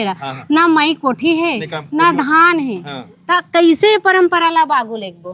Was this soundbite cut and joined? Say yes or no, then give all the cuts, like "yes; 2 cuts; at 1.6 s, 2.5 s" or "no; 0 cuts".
no; 0 cuts